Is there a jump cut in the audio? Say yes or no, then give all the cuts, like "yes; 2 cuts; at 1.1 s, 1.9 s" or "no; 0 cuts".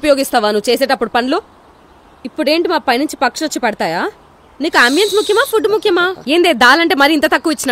yes; 1 cut; at 6.2 s